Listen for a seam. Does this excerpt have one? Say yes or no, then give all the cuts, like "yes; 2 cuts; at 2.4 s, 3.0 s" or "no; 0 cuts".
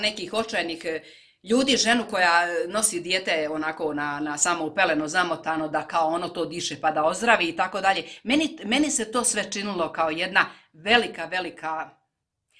no; 0 cuts